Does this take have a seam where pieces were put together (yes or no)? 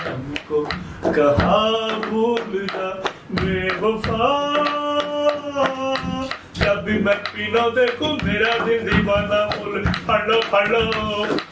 no